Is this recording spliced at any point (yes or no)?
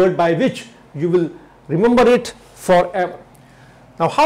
yes